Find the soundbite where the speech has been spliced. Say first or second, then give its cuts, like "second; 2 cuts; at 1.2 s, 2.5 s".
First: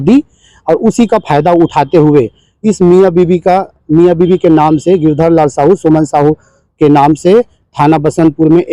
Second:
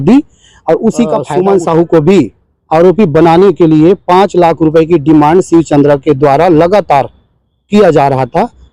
second; 1 cut; at 1.2 s